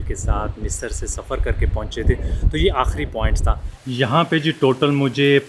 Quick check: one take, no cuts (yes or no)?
no